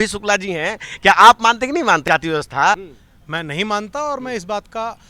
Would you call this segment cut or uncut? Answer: cut